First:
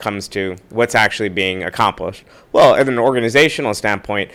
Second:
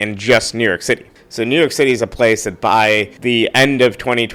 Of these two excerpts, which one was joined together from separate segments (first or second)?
second